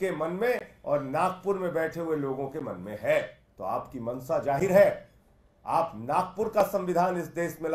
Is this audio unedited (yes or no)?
no